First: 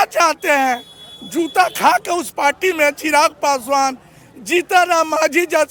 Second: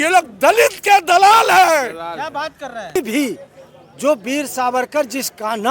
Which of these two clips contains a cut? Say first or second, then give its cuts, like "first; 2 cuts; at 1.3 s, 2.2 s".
second; 1 cut; at 3.0 s